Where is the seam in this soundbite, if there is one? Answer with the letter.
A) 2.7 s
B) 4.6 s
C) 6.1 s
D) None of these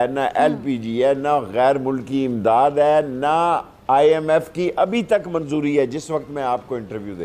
D